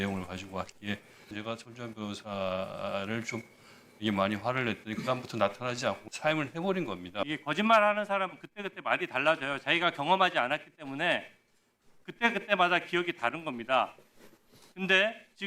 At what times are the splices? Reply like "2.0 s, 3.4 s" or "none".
1.3 s, 6.0 s, 7.3 s